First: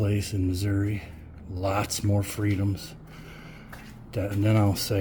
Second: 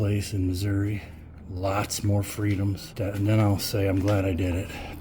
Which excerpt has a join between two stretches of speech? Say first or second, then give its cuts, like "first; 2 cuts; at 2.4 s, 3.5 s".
second; 1 cut; at 2.9 s